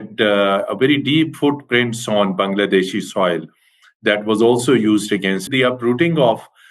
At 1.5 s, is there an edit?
no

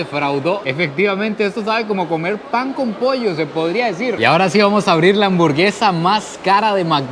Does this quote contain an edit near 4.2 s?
yes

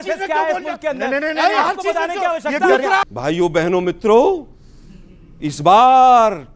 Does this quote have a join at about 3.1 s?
yes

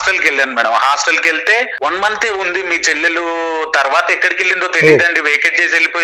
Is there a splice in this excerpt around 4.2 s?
no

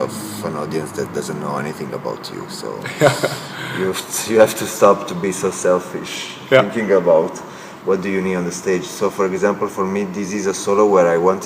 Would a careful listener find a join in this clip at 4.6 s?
no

